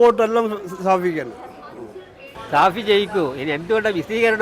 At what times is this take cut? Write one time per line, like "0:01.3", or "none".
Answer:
0:02.3